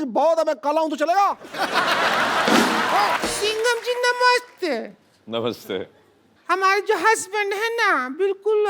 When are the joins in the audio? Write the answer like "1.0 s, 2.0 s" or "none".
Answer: 3.2 s